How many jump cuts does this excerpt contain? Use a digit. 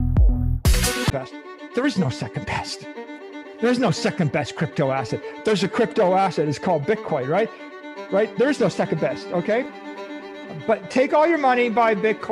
1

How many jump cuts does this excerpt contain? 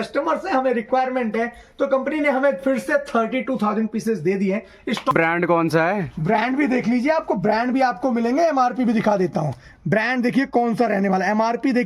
1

